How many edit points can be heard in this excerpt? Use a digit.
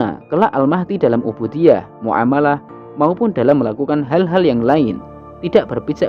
0